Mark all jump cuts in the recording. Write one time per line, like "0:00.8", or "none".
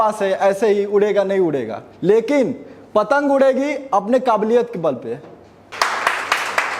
0:05.7